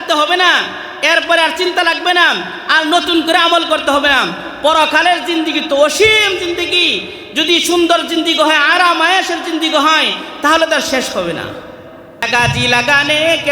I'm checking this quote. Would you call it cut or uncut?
cut